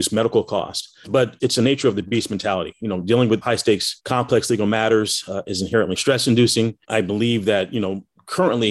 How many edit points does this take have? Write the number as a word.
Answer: three